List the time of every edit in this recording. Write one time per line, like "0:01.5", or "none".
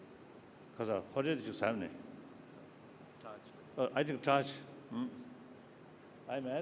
none